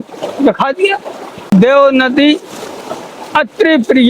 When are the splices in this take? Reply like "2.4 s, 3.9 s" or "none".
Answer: 1.5 s